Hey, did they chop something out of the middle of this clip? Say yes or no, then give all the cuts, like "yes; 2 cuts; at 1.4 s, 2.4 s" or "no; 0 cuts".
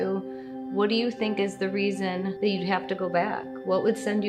yes; 1 cut; at 2.3 s